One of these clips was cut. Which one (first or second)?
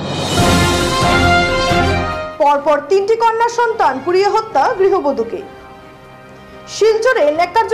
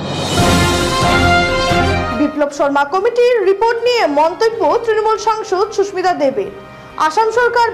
first